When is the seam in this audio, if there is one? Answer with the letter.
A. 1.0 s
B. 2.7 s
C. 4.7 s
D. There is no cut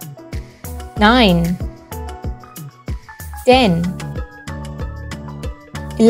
A